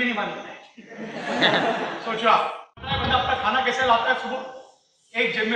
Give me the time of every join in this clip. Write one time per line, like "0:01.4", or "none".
0:02.9